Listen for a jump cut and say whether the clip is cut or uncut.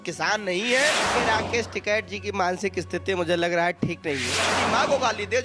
cut